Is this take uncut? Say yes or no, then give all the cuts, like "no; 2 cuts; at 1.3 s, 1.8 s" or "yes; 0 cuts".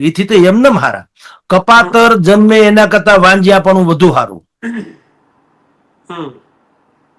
yes; 0 cuts